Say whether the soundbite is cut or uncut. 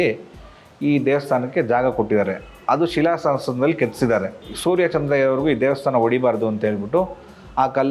cut